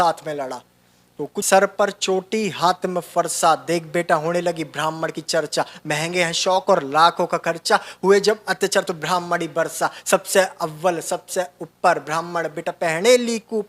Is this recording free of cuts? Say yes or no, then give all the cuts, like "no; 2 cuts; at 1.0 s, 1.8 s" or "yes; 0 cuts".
no; 1 cut; at 1.4 s